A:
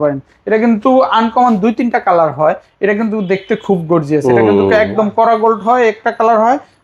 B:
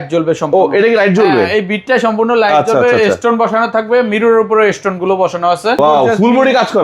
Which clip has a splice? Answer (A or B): B